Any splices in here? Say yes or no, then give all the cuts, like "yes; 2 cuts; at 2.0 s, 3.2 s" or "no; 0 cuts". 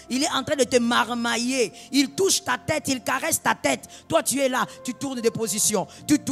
no; 0 cuts